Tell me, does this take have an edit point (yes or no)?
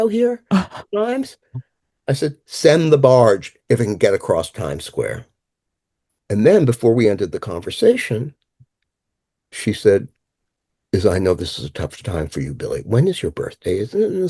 no